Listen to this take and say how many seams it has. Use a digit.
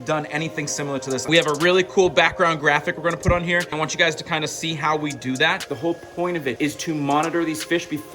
4